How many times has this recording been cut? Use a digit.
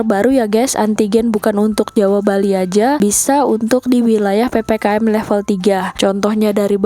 1